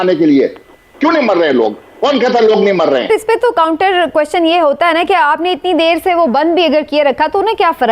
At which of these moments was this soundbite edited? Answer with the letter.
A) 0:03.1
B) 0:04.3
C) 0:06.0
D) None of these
A